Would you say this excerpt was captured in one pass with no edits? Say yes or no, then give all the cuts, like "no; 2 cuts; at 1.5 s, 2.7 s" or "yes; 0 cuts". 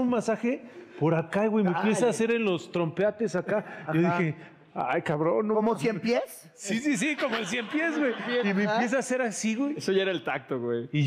yes; 0 cuts